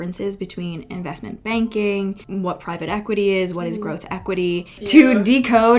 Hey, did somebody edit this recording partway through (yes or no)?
yes